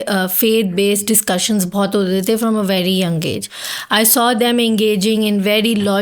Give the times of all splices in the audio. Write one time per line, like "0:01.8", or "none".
none